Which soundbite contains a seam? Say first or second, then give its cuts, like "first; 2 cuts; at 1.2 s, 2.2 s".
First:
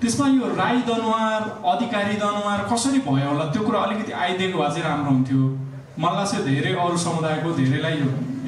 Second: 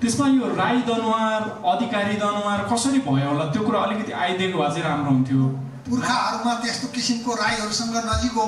second; 1 cut; at 5.7 s